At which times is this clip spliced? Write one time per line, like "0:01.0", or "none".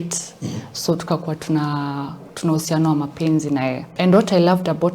0:03.9